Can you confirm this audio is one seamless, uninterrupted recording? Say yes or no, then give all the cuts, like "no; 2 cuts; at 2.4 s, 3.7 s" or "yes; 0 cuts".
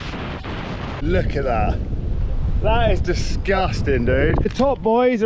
no; 2 cuts; at 1.0 s, 4.5 s